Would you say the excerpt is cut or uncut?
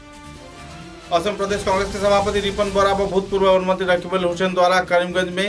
cut